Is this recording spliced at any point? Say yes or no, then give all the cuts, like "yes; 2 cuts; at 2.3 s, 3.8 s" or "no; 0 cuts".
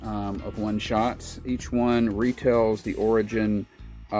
no; 0 cuts